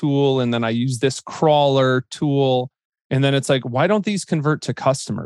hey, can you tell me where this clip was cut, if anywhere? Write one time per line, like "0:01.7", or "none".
0:02.9